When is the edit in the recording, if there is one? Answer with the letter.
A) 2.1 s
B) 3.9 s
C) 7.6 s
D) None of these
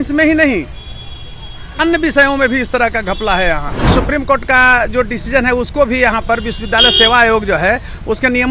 B